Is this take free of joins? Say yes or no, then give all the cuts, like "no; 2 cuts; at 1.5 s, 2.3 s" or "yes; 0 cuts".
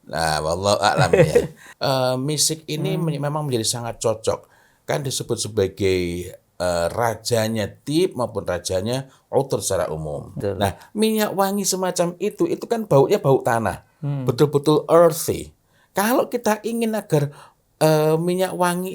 no; 2 cuts; at 1.6 s, 10.3 s